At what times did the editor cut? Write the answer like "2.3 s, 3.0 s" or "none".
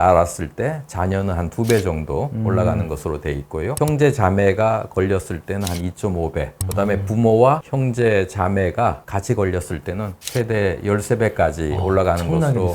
none

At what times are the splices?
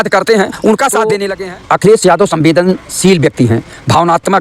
1.2 s

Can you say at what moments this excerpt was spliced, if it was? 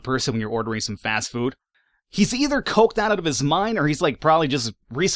1.8 s

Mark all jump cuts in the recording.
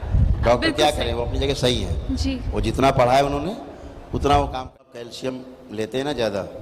5.0 s

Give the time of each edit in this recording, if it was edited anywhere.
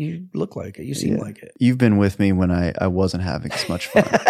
1.5 s

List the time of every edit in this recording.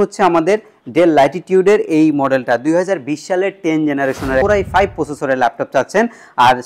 4.4 s

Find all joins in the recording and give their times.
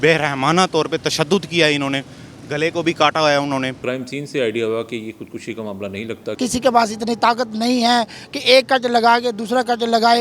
3.8 s, 6.3 s

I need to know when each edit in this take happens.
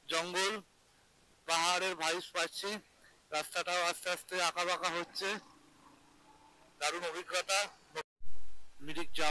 8.1 s

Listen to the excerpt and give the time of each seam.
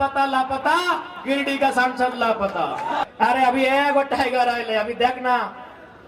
3.0 s

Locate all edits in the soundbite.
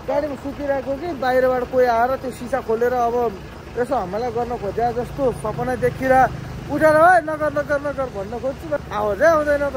8.8 s

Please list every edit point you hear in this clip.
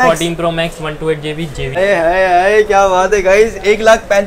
1.8 s

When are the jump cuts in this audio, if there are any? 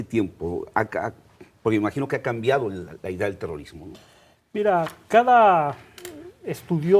1.0 s

